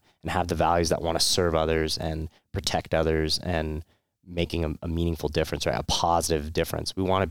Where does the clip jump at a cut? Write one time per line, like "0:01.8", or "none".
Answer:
none